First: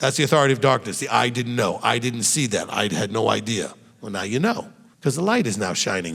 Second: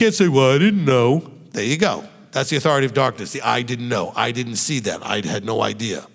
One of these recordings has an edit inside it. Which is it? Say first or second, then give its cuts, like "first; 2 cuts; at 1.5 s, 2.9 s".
first; 1 cut; at 4.8 s